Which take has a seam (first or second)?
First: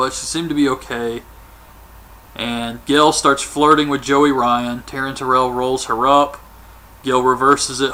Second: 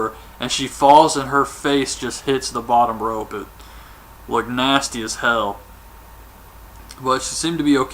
second